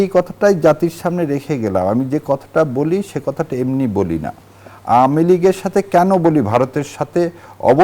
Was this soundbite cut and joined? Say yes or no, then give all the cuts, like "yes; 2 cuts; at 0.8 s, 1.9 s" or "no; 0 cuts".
no; 0 cuts